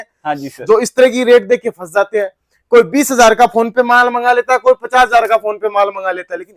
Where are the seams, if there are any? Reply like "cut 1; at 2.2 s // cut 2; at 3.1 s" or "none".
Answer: none